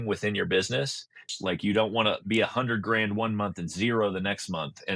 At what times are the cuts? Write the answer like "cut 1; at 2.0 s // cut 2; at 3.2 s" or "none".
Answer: cut 1; at 1.2 s